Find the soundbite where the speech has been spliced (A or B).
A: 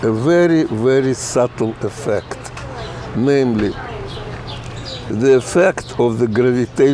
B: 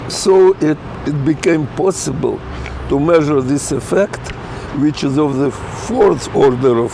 B